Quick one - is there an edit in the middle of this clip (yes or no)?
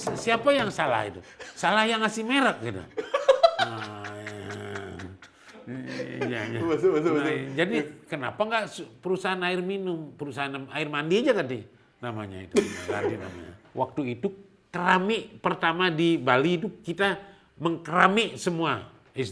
yes